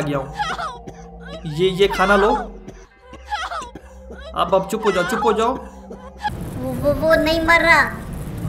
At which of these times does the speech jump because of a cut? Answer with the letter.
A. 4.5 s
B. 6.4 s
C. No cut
B